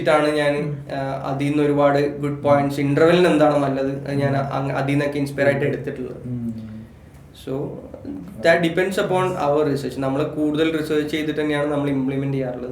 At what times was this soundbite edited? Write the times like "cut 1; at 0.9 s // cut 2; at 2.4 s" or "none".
none